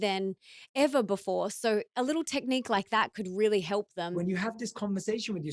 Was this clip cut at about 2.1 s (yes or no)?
no